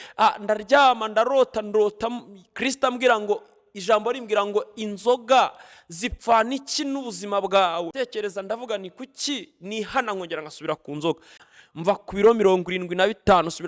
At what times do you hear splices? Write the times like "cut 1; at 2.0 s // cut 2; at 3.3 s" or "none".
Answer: cut 1; at 7.9 s // cut 2; at 11.5 s

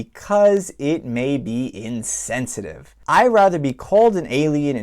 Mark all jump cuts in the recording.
cut 1; at 2.9 s

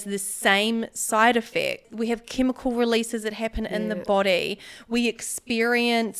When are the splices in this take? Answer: none

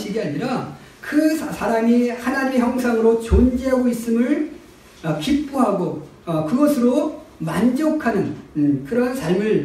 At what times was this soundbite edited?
none

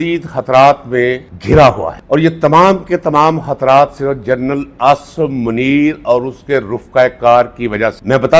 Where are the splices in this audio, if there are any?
none

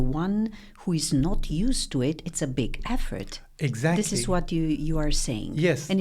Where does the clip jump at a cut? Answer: none

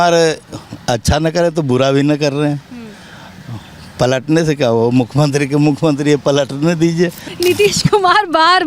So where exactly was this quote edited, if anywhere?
cut 1; at 7.3 s

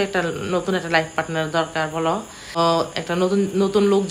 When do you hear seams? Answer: cut 1; at 2.6 s

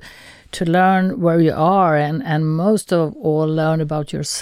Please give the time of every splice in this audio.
none

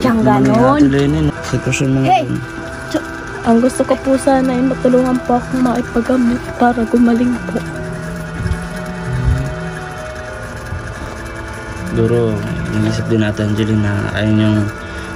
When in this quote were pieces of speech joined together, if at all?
cut 1; at 1.4 s

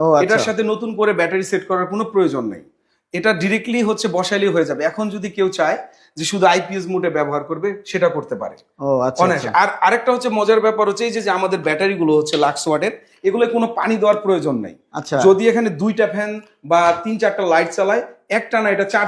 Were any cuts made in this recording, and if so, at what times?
none

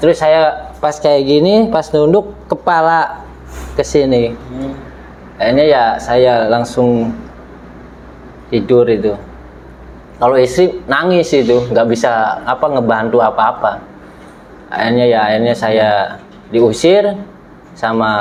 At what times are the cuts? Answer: none

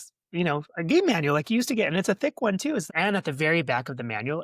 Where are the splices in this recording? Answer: cut 1; at 2.9 s

